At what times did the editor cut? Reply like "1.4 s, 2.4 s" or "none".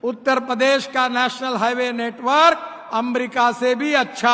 none